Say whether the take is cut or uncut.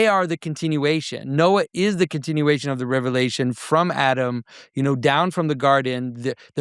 uncut